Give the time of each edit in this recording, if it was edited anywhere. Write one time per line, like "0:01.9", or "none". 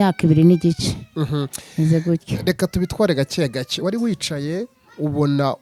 none

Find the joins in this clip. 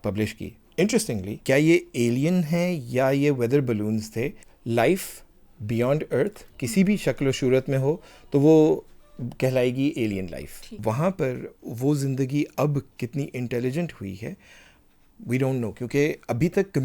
0:01.4
0:04.5
0:10.7

